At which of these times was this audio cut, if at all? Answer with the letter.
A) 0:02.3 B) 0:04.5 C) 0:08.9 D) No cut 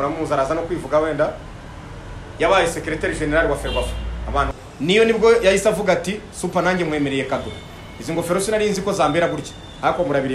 B